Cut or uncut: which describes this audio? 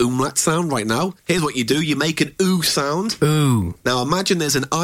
cut